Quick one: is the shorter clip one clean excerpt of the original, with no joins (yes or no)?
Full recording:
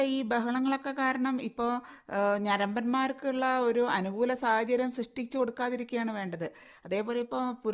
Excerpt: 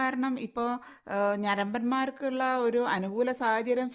yes